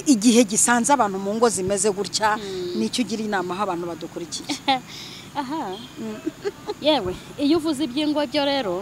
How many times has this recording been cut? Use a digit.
0